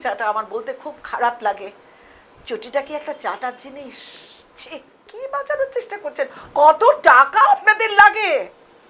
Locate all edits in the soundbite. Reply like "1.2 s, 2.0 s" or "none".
5.1 s